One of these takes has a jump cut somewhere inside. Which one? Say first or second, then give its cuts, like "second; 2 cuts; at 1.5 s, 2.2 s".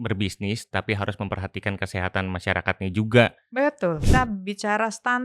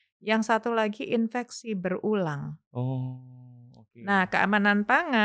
first; 1 cut; at 4.0 s